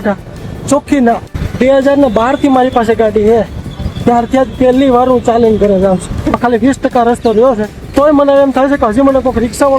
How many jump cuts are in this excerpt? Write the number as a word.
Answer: three